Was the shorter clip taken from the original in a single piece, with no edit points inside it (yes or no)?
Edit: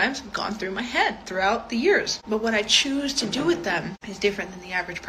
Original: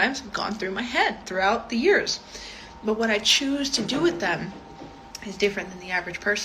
no